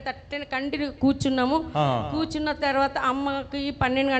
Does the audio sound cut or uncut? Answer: uncut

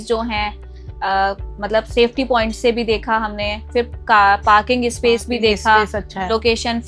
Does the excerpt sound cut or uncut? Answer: uncut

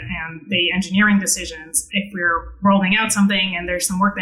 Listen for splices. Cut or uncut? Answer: uncut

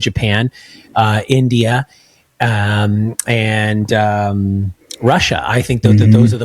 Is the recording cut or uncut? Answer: uncut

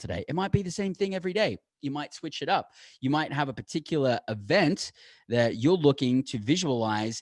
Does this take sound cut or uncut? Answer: uncut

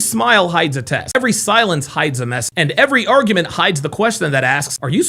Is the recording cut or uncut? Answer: uncut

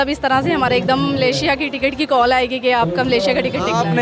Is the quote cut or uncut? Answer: uncut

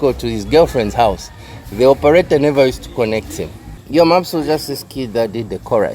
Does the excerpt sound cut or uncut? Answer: cut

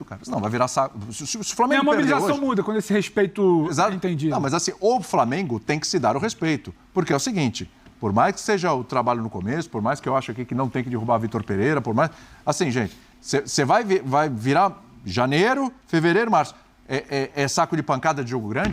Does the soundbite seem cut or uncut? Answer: uncut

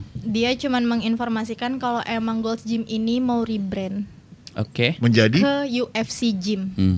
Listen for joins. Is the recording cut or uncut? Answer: uncut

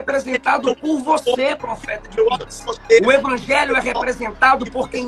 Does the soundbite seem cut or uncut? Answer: uncut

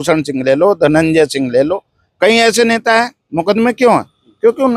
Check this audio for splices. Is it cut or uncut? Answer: uncut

